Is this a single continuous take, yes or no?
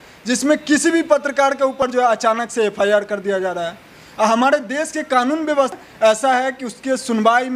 no